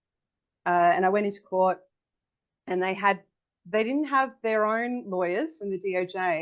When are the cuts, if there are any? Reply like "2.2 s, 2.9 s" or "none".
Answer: none